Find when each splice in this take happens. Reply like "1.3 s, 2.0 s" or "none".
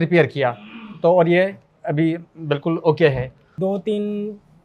3.5 s